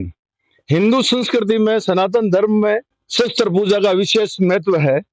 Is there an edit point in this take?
yes; 1 cut; at 3.0 s

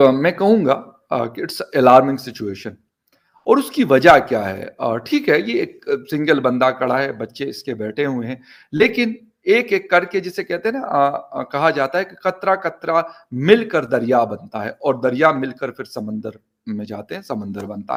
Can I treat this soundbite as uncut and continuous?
yes; 0 cuts

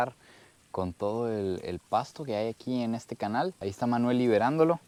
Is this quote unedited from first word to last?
yes; 0 cuts

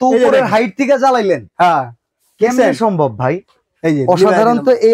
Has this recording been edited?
no; 0 cuts

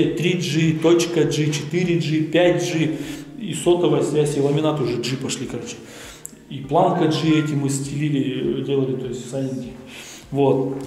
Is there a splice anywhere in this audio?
no; 0 cuts

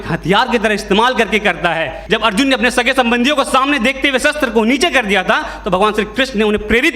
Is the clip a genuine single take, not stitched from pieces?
no; 1 cut; at 2.0 s

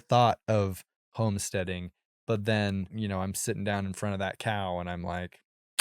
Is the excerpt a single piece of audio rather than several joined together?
no; 1 cut; at 2.9 s

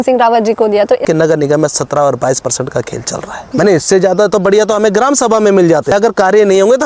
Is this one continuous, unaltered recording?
no; 3 cuts; at 1.0 s, 3.4 s, 5.9 s

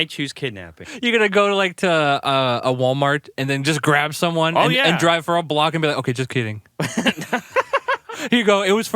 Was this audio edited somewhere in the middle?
yes; 1 cut; at 0.9 s

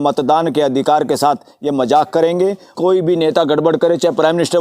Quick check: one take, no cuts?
no; 1 cut; at 2.7 s

